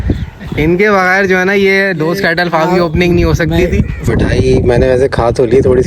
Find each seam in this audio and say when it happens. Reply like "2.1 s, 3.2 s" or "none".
4.1 s